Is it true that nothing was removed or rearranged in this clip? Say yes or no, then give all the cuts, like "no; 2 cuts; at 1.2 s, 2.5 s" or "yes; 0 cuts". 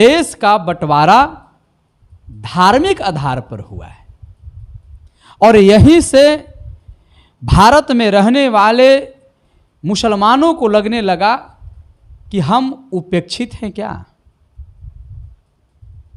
yes; 0 cuts